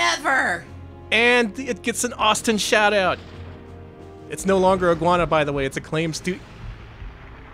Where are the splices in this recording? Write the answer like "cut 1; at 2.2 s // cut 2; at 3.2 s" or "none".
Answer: none